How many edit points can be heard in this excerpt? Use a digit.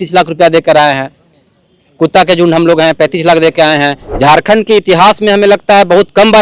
1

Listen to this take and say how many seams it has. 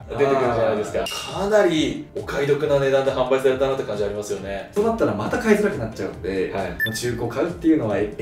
3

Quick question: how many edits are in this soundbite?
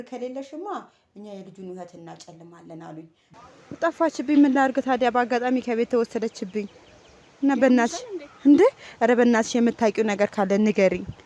1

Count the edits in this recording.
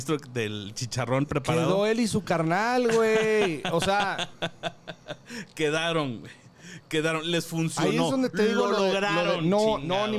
0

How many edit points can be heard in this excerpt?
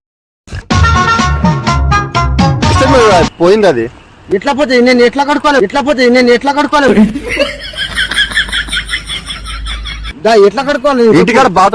0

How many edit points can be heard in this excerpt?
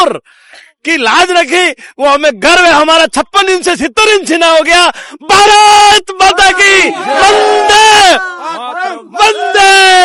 0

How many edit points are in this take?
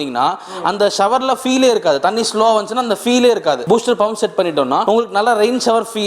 2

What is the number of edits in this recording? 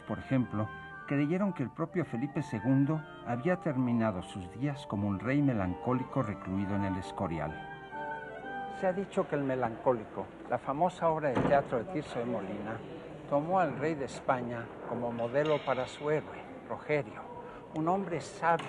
1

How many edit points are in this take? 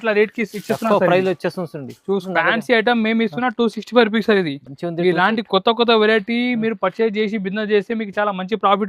1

